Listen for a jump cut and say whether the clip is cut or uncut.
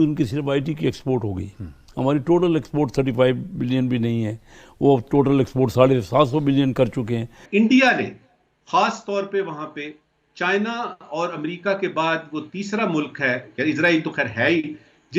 cut